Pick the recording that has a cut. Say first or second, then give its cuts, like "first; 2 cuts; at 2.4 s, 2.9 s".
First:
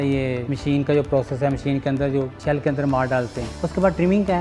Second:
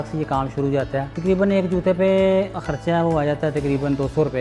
second; 2 cuts; at 1.1 s, 2.6 s